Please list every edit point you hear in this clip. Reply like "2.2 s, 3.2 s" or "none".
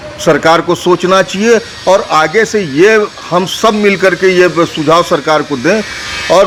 none